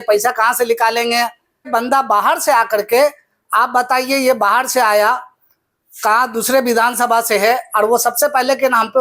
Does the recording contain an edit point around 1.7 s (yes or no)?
yes